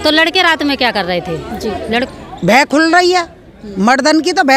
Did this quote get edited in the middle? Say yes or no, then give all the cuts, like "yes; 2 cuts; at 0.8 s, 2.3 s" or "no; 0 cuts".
yes; 1 cut; at 2.0 s